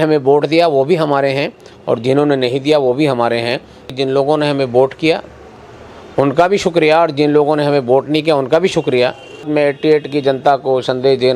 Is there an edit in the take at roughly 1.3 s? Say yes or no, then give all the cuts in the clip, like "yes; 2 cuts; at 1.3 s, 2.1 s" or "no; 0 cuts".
no; 2 cuts; at 3.9 s, 9.5 s